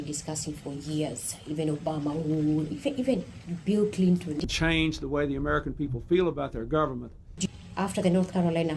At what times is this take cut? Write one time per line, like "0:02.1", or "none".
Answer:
0:04.4
0:07.4

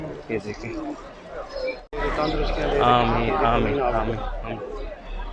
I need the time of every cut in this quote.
0:01.8

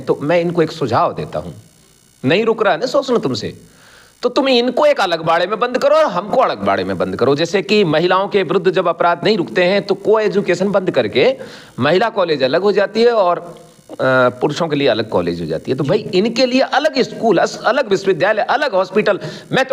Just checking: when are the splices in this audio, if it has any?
none

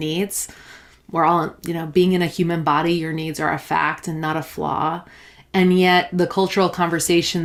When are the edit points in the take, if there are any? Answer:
none

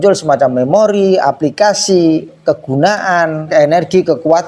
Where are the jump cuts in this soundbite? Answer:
0:03.5

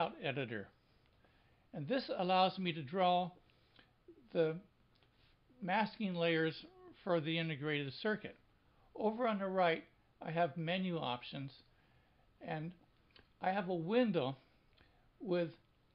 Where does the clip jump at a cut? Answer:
0:06.4

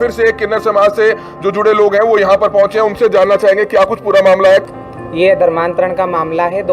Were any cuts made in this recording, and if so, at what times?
0:04.6

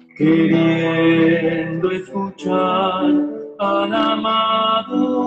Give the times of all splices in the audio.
0:00.9

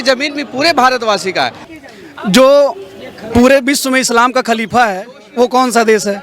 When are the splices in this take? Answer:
0:01.7

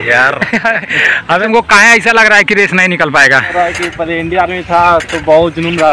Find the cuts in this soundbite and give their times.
0:01.4
0:03.5

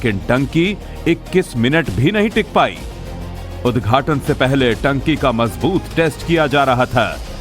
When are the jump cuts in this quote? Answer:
0:02.3

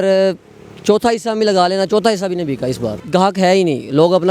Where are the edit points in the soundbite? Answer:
0:02.9

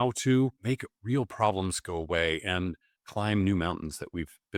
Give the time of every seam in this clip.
none

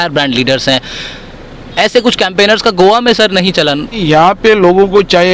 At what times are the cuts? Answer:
0:04.0

